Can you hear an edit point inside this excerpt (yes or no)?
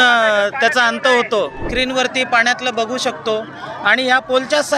yes